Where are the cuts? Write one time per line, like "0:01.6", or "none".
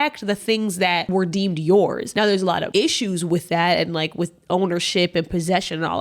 0:01.1
0:02.3